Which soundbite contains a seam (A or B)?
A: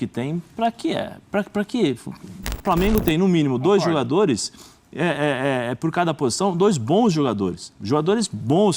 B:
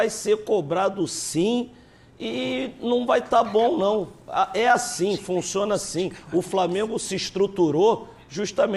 A